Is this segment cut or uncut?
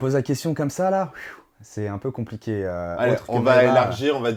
uncut